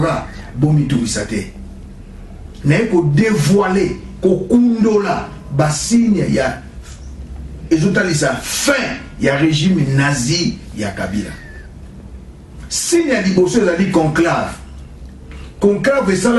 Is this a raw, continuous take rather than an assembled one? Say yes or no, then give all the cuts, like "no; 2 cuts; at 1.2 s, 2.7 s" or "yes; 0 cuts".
yes; 0 cuts